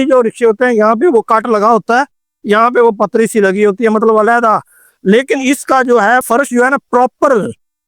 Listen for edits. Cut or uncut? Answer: uncut